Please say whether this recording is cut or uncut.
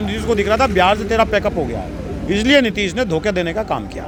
uncut